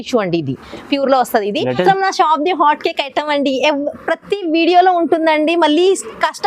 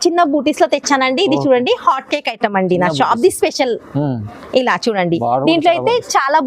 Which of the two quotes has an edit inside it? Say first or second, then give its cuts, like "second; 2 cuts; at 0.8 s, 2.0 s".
first; 1 cut; at 1.8 s